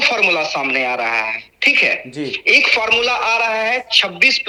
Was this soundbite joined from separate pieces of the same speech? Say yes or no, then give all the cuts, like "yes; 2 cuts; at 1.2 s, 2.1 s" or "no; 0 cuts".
no; 0 cuts